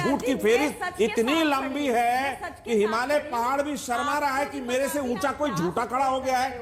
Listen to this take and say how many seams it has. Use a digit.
0